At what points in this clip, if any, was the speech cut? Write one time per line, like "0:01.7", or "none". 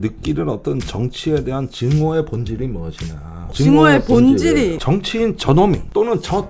0:03.5
0:04.8